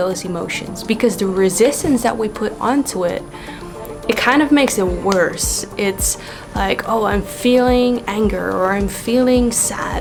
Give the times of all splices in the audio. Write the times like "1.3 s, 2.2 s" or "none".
none